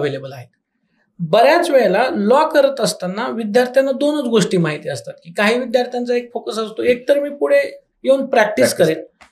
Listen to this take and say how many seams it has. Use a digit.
0